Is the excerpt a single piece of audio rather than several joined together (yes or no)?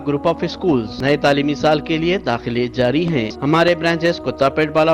no